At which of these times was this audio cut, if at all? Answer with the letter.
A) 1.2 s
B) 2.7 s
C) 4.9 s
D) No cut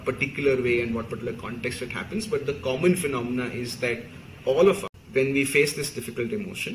C